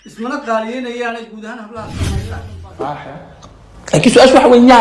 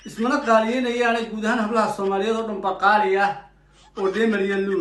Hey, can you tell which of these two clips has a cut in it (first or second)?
first